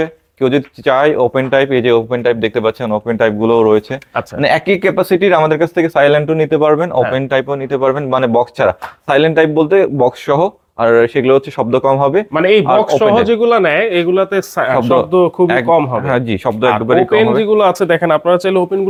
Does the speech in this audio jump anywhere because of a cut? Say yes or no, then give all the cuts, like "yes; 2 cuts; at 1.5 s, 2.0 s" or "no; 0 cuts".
no; 0 cuts